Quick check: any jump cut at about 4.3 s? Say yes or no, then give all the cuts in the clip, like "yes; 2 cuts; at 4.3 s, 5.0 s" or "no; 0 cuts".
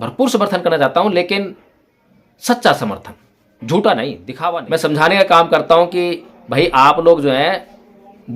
yes; 1 cut; at 4.3 s